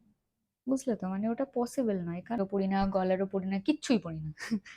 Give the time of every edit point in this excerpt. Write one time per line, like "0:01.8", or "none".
0:02.4